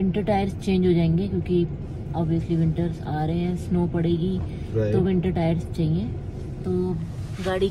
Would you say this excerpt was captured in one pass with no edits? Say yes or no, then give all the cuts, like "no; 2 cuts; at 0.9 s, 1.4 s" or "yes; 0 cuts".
yes; 0 cuts